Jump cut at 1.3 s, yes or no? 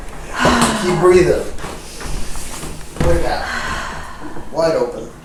no